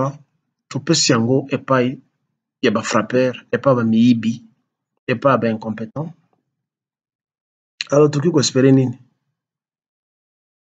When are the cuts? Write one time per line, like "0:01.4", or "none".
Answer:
none